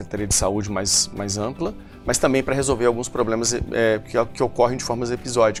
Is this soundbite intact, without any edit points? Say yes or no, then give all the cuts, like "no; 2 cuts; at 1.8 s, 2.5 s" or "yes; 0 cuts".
yes; 0 cuts